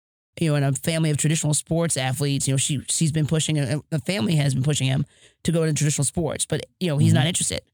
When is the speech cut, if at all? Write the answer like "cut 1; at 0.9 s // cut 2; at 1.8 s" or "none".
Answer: none